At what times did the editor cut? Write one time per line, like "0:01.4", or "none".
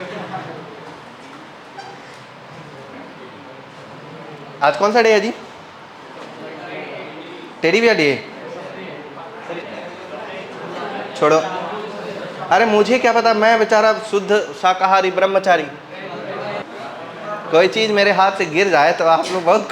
0:09.6
0:16.6